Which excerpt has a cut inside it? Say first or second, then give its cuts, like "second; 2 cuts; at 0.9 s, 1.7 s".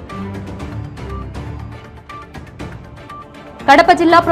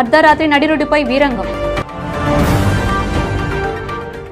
first; 1 cut; at 1.8 s